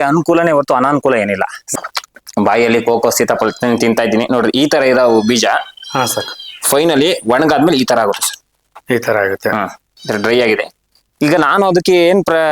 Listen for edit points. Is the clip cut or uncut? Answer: cut